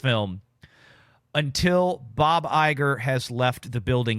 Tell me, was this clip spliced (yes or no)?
no